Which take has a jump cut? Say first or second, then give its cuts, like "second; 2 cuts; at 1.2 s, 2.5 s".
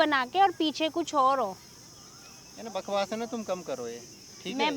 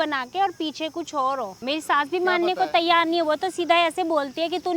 second; 1 cut; at 1.6 s